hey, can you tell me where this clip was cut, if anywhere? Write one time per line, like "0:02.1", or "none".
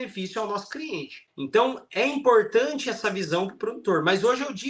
0:01.2